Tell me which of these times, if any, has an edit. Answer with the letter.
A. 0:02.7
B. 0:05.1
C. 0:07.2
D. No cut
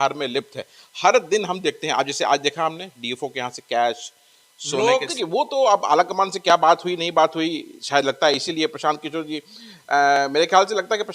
B